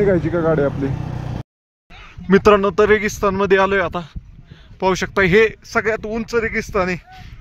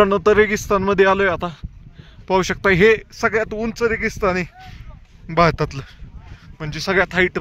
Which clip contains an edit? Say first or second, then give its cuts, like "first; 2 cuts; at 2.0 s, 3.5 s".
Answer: first; 1 cut; at 1.5 s